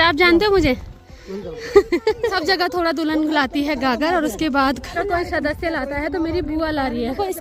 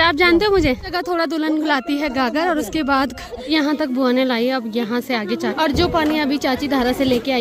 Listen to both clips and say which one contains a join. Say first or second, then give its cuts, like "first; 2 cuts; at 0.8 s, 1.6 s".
second; 3 cuts; at 0.9 s, 3.5 s, 5.5 s